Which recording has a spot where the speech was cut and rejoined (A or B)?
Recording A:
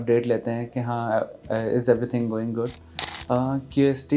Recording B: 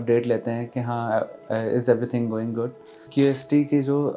B